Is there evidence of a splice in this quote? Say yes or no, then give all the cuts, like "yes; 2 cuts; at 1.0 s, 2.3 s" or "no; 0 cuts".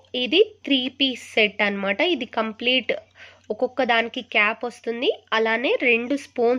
no; 0 cuts